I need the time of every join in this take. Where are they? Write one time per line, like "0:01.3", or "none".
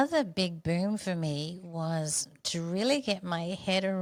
none